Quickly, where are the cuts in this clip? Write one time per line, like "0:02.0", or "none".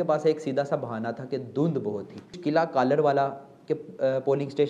0:02.4